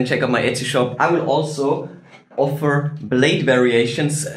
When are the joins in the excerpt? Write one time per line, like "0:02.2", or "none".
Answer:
0:00.9